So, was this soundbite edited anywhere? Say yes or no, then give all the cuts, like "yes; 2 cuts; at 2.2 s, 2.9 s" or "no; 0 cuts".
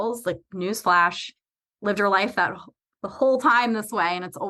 no; 0 cuts